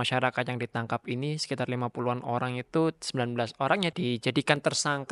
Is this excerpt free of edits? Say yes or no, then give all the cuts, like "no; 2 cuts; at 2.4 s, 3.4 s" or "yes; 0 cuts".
no; 1 cut; at 3.9 s